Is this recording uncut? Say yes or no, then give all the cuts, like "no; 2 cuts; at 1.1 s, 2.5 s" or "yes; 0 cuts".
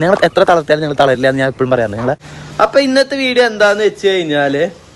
no; 1 cut; at 2.3 s